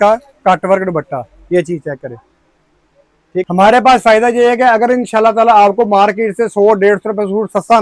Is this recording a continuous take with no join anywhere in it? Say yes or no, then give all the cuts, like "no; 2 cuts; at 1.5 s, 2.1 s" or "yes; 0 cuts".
no; 1 cut; at 3.4 s